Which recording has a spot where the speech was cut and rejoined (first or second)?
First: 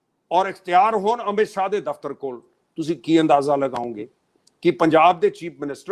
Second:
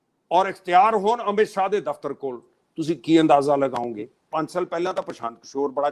second